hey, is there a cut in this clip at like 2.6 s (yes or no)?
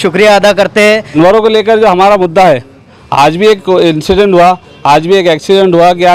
no